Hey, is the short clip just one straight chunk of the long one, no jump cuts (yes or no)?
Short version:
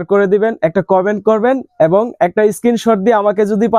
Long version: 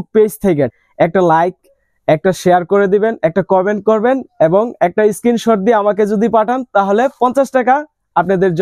yes